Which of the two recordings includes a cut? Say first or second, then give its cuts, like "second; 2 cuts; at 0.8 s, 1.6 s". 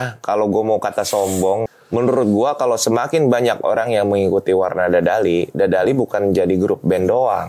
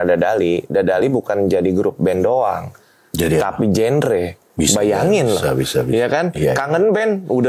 first; 1 cut; at 1.7 s